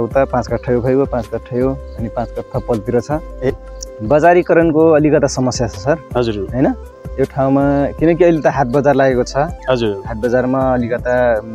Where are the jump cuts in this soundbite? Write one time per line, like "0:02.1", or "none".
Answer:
0:03.6